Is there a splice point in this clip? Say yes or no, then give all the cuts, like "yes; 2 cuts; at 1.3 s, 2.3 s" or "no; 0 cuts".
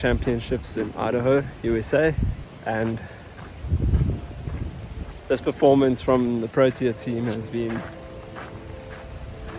yes; 1 cut; at 2.5 s